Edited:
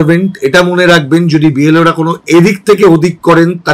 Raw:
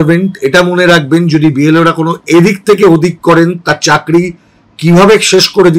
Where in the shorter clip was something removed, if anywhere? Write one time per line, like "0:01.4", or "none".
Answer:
none